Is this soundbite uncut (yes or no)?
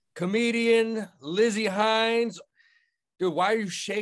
no